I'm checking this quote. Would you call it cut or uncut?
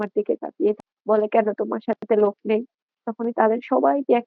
cut